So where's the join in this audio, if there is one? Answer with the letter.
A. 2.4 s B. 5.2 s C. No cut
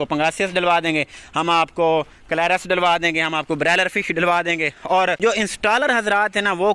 B